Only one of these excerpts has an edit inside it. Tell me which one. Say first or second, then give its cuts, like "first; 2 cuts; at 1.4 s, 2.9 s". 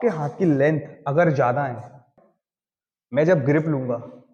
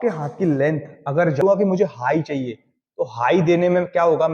second; 1 cut; at 1.4 s